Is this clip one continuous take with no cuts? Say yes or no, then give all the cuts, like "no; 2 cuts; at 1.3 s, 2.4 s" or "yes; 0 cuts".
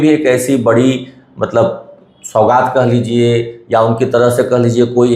yes; 0 cuts